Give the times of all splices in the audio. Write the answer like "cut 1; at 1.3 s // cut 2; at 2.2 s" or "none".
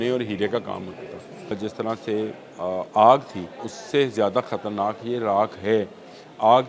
cut 1; at 1.5 s // cut 2; at 3.7 s